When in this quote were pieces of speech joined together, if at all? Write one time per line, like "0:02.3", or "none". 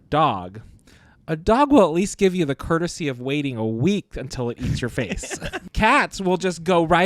0:05.6